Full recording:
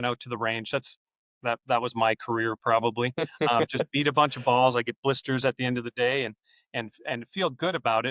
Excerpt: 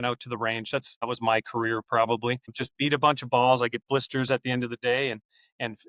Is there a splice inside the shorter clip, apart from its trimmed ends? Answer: yes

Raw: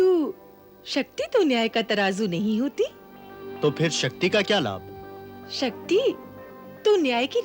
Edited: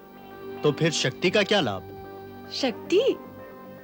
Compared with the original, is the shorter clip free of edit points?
yes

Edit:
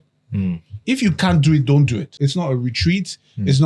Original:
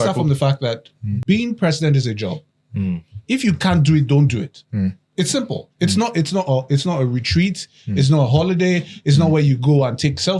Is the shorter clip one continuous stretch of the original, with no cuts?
no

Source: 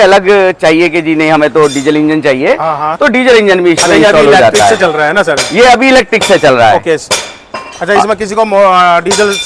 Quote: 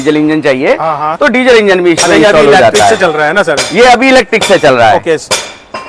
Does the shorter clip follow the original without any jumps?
yes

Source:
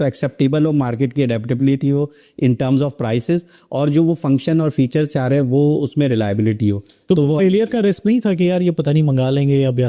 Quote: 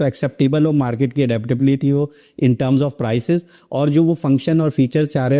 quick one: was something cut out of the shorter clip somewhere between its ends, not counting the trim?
no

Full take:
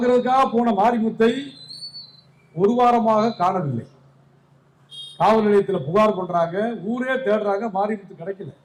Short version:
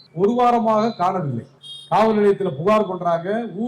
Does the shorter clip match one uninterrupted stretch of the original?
no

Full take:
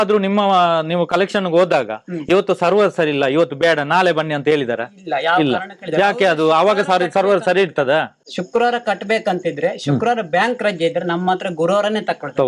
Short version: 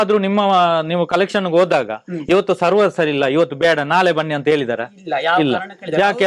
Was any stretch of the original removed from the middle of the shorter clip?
no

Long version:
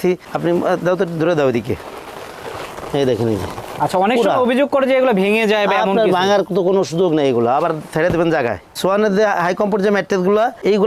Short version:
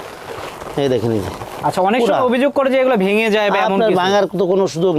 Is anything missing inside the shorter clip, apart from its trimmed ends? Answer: no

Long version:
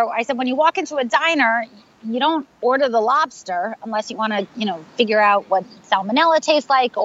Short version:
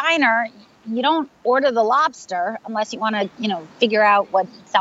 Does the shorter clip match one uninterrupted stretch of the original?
yes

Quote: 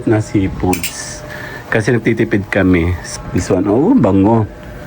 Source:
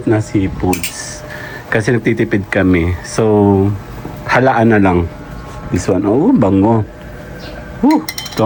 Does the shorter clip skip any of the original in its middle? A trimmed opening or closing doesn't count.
yes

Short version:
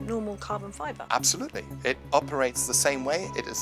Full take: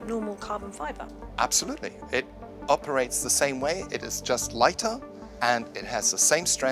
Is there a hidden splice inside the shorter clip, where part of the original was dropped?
yes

